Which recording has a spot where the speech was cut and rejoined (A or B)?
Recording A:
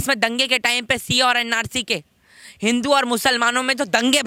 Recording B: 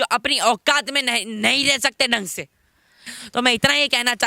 B